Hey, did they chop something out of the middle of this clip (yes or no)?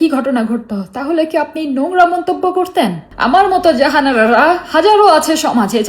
yes